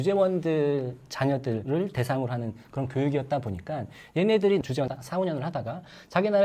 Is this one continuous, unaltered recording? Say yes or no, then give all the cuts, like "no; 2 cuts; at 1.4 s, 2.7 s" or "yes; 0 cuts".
yes; 0 cuts